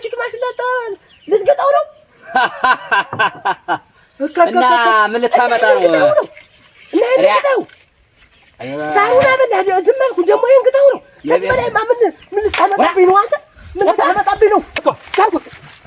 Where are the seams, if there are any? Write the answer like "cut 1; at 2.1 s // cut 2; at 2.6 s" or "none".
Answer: cut 1; at 14.8 s